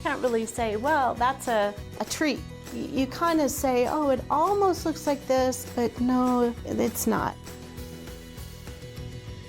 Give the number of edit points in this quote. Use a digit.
3